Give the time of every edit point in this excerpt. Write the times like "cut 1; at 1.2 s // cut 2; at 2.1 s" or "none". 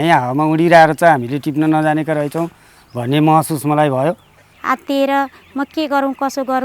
cut 1; at 4.5 s